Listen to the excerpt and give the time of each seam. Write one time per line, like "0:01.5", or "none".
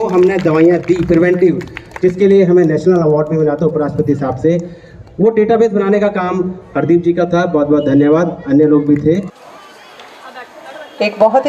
0:09.3